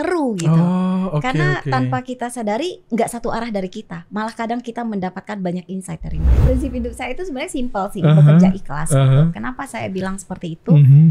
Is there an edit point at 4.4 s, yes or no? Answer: no